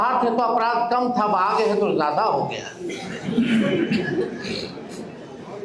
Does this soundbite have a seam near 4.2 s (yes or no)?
no